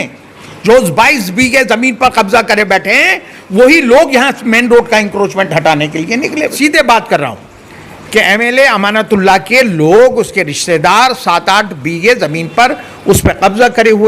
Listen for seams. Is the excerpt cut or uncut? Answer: cut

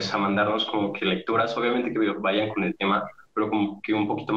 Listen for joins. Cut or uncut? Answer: uncut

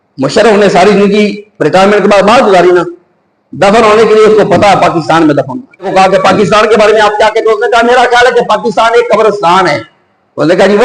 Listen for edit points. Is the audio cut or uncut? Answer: cut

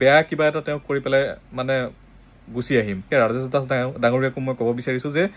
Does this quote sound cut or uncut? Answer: cut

